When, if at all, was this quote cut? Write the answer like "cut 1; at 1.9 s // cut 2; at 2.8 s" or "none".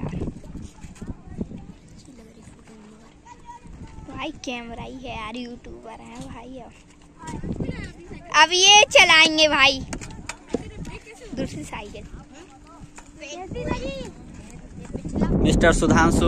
cut 1; at 1.8 s // cut 2; at 7.3 s // cut 3; at 15.3 s